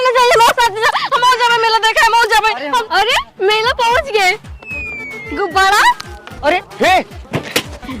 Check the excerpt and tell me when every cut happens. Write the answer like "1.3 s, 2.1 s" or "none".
2.8 s

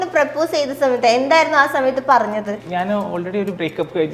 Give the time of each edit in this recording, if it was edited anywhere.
2.6 s

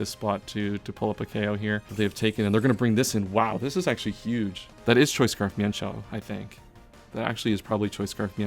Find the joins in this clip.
1.9 s, 4.7 s

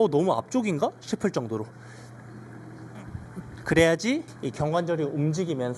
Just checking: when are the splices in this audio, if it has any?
4.4 s

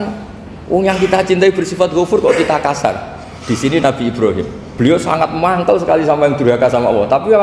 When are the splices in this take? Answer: 4.6 s

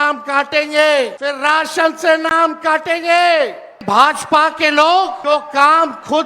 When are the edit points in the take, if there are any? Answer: 1.2 s, 3.7 s, 5.2 s

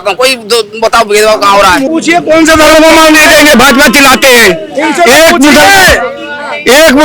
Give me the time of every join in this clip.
1.9 s

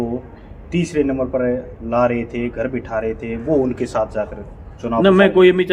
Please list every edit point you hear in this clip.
none

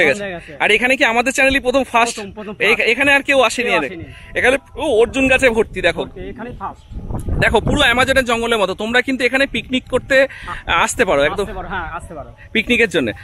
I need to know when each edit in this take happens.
none

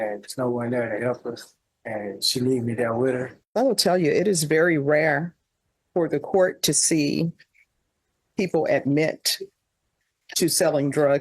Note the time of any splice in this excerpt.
3.4 s

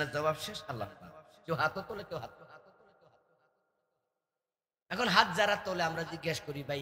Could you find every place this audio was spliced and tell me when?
none

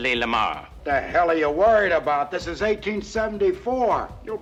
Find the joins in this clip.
none

